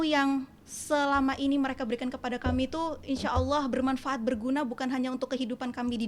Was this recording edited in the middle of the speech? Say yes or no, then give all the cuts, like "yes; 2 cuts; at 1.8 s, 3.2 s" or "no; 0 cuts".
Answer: no; 0 cuts